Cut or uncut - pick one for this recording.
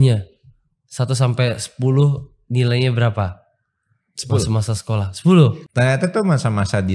cut